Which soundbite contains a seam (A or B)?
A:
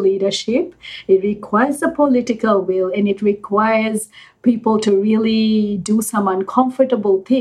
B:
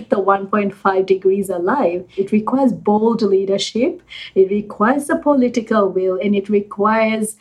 B